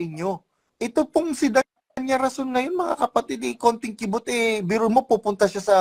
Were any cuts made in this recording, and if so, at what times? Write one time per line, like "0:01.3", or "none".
none